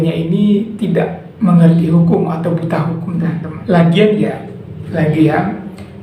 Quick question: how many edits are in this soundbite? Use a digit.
1